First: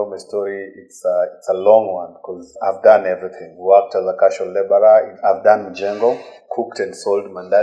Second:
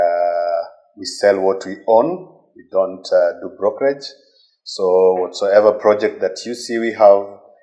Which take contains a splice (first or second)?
first